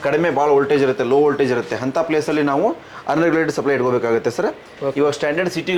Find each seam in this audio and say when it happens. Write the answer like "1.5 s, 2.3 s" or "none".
none